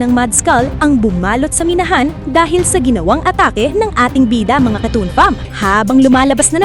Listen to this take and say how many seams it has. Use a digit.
1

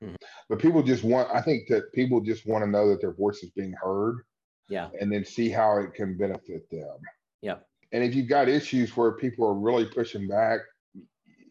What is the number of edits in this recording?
1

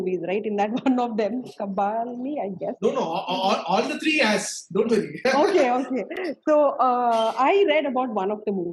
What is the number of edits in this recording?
0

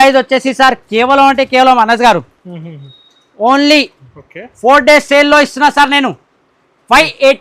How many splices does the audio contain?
0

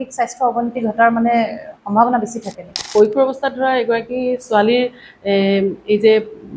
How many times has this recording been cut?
1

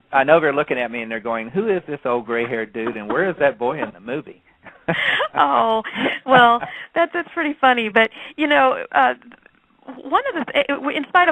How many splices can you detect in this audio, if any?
0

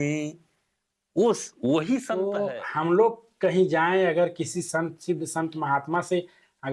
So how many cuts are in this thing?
1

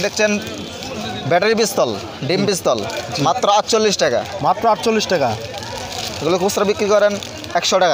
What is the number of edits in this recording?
0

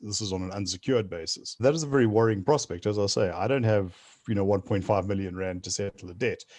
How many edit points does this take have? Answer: 2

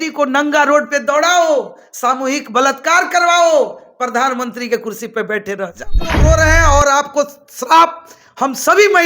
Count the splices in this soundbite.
1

